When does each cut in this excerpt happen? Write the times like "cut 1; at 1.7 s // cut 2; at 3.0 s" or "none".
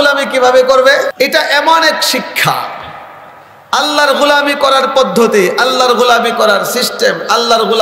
cut 1; at 1.1 s